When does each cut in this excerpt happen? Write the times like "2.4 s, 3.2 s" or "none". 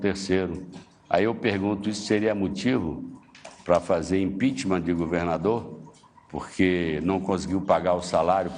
5.4 s